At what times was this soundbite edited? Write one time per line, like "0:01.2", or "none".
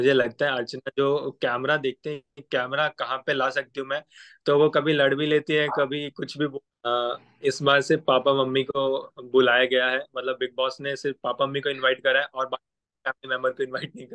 0:06.7